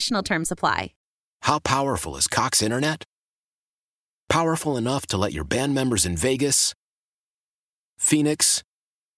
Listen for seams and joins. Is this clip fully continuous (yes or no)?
no